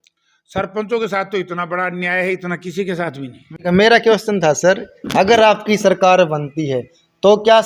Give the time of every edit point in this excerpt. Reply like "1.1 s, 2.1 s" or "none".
3.6 s